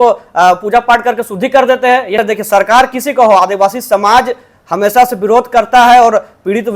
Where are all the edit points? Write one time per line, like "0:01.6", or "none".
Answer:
0:02.2